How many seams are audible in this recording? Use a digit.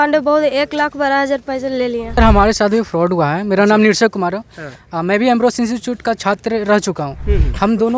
1